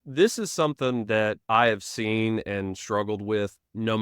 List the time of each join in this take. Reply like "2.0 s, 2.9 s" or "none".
1.4 s